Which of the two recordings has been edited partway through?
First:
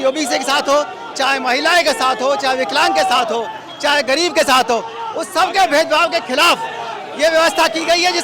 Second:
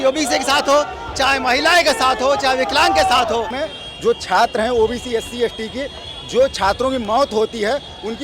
second; 1 cut; at 3.6 s

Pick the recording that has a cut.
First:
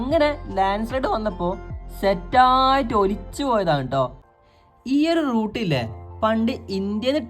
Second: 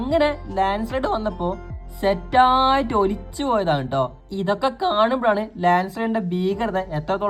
first; 1 cut; at 4.2 s

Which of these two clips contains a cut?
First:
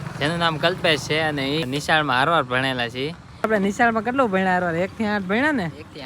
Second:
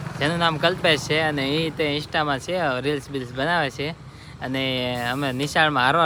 first; 2 cuts; at 1.6 s, 3.5 s

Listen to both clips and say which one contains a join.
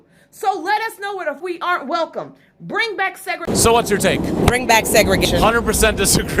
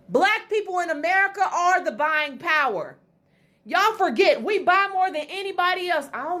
first; 3 cuts; at 1.4 s, 3.4 s, 5.2 s

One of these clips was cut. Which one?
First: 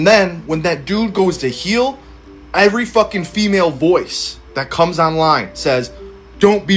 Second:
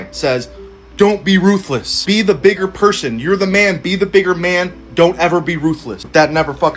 second; 1 cut; at 4.8 s

